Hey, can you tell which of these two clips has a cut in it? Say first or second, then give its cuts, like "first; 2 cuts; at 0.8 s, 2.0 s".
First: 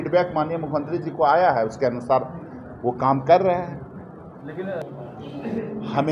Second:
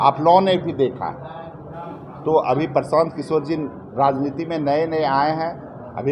first; 1 cut; at 4.8 s